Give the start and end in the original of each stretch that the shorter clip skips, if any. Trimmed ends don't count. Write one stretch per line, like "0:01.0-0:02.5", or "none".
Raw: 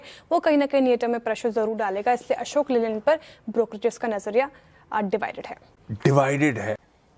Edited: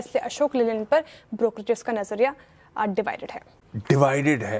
none